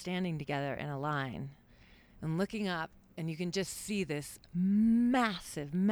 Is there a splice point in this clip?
no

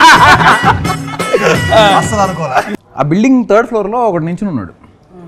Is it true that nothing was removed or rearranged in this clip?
no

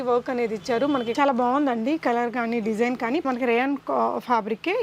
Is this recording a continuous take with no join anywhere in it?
no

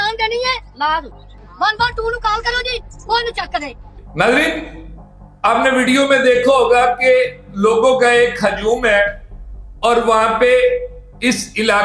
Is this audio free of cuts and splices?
no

